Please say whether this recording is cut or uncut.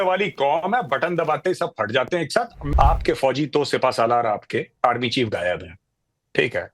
cut